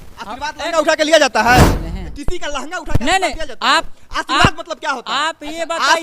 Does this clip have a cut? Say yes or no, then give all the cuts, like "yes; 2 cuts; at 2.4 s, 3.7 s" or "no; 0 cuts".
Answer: yes; 1 cut; at 1.8 s